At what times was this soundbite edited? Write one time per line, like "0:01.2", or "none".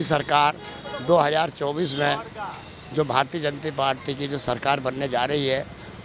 none